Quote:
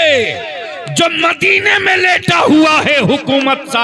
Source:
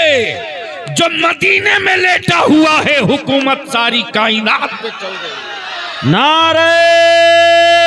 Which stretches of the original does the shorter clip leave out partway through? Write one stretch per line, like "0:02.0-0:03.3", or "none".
none